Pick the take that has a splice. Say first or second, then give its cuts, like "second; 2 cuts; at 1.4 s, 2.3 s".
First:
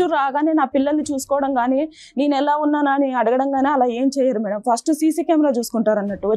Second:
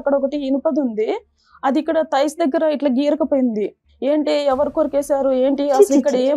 second; 1 cut; at 3.8 s